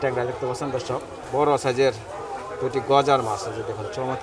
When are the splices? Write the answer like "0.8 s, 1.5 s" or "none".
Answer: 1.1 s